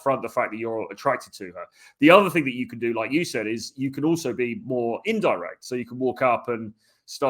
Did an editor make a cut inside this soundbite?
no; 0 cuts

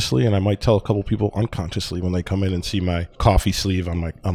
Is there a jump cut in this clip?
yes; 1 cut; at 3.1 s

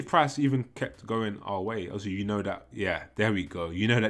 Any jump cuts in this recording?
no; 0 cuts

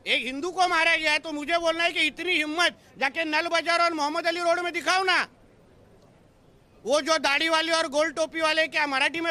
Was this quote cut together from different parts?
no; 0 cuts

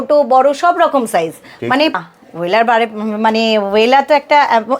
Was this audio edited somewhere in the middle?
yes; 1 cut; at 2.0 s

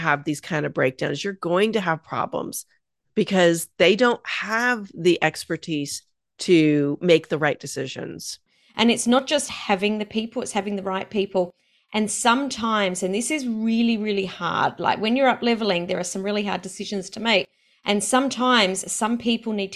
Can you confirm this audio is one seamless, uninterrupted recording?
no; 1 cut; at 8.5 s

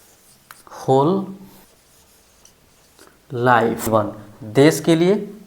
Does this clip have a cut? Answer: yes; 2 cuts; at 1.6 s, 3.9 s

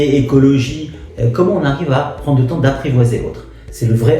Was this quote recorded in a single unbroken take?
no; 1 cut; at 1.0 s

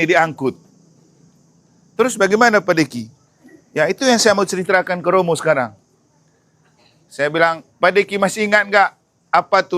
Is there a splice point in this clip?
no; 0 cuts

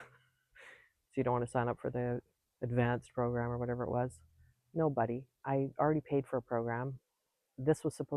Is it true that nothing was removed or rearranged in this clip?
yes; 0 cuts

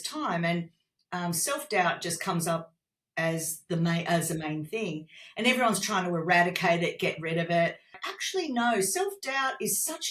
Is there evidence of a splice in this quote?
yes; 1 cut; at 8.0 s

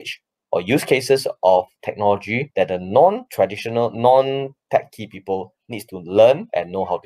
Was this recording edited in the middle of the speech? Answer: no; 0 cuts

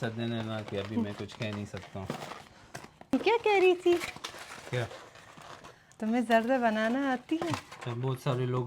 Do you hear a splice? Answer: yes; 2 cuts; at 3.1 s, 7.8 s

